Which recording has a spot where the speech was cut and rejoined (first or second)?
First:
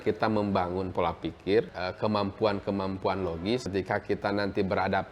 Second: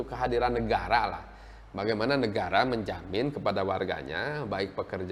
first